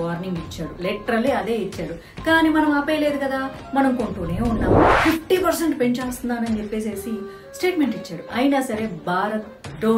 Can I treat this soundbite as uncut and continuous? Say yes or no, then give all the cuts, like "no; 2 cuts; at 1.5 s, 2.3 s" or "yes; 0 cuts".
no; 1 cut; at 5.0 s